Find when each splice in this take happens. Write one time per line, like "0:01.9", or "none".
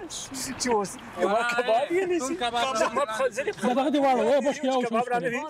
none